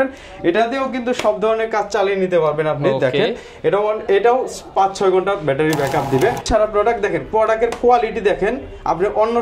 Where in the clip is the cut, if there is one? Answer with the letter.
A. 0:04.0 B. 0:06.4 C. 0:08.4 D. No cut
B